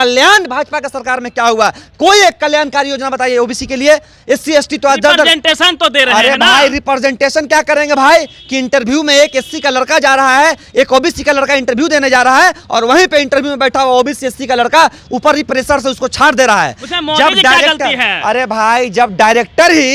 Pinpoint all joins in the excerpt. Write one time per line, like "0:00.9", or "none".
none

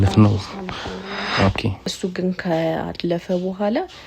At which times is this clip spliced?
0:01.8

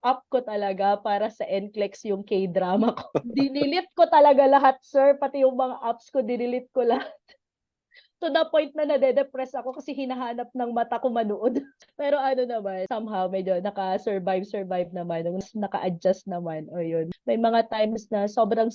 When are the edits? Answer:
0:12.8
0:15.4
0:17.1

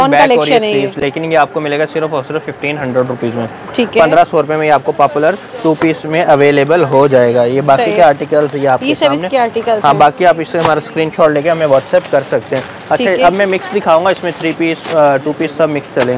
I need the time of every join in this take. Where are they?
none

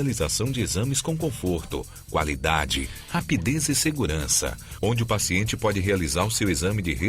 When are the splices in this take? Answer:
none

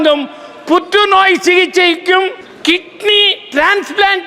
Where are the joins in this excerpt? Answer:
0:02.5

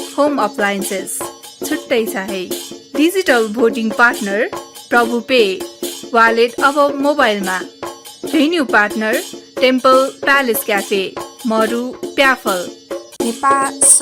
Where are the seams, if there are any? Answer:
0:09.4
0:13.0

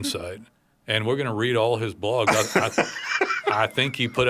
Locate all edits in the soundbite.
none

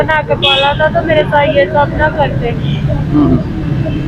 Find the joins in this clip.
none

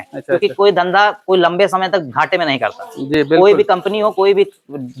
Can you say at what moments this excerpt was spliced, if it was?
none

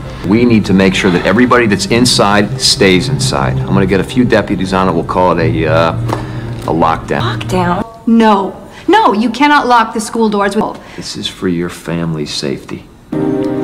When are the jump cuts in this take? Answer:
0:07.8

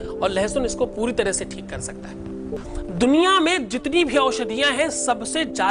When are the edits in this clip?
0:02.6

